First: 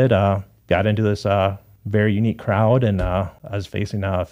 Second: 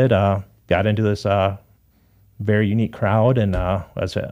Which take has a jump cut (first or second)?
first